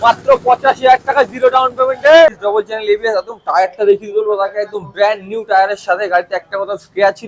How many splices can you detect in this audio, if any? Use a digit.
1